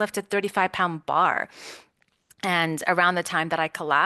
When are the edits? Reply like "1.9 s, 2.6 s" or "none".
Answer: none